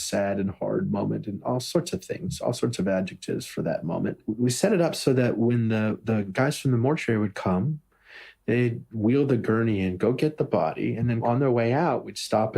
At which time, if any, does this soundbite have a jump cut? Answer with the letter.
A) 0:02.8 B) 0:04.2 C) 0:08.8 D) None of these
B